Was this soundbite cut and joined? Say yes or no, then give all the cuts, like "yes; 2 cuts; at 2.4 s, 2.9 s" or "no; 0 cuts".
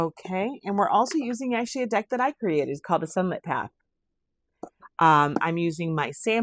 no; 0 cuts